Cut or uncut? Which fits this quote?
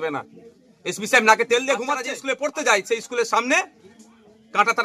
cut